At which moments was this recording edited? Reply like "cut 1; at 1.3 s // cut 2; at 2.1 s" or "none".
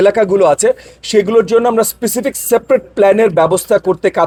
none